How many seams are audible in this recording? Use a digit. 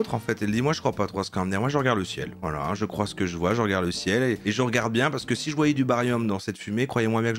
0